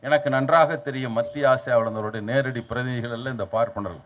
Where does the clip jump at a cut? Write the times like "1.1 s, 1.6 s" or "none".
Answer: none